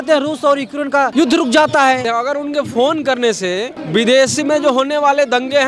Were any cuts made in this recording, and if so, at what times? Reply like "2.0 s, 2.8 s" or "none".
1.1 s, 2.1 s, 3.7 s